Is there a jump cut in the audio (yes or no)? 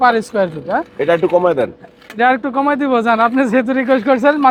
no